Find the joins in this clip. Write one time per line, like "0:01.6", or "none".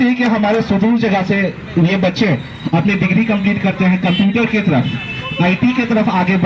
none